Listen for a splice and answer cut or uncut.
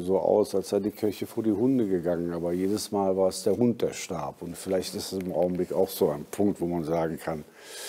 uncut